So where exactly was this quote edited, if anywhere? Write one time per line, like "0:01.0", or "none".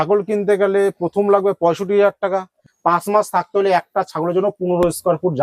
0:02.6